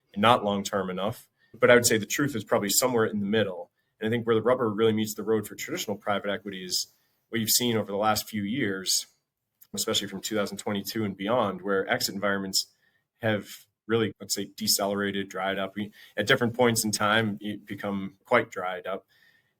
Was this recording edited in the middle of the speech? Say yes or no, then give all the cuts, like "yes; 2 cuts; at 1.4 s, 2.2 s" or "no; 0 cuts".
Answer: yes; 3 cuts; at 1.5 s, 9.8 s, 18.2 s